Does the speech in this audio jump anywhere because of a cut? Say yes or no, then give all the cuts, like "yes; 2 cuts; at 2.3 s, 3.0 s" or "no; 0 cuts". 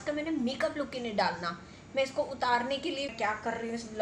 yes; 1 cut; at 3.1 s